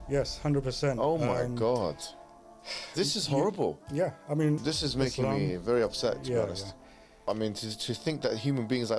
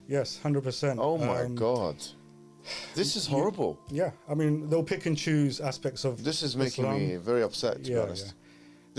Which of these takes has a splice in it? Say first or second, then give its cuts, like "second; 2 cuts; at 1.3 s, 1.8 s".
first; 2 cuts; at 4.6 s, 7.3 s